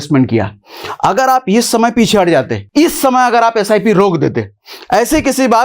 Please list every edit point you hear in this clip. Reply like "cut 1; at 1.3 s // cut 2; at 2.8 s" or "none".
cut 1; at 2.6 s